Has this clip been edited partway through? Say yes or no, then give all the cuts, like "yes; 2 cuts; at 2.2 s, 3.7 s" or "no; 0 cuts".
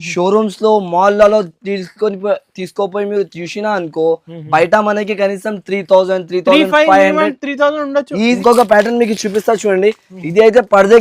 yes; 1 cut; at 8.4 s